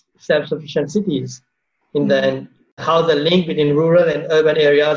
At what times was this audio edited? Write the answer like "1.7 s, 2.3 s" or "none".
2.8 s